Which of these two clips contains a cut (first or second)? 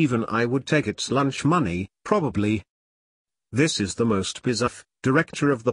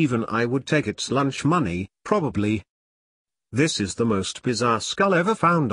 second